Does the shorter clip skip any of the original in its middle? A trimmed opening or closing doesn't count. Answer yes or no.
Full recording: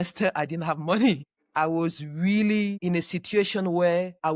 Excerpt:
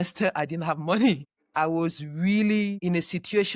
no